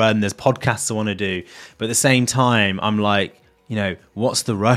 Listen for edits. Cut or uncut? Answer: uncut